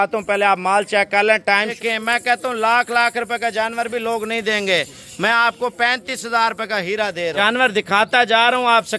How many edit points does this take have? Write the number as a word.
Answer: two